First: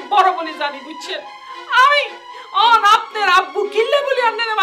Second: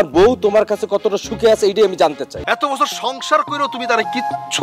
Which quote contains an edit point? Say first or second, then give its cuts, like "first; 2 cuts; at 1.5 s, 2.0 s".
second; 1 cut; at 2.4 s